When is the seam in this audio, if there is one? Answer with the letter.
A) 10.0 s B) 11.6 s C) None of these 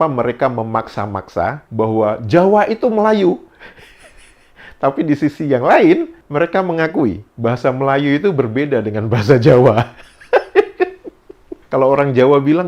B